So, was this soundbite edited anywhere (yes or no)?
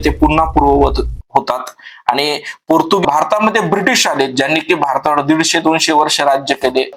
yes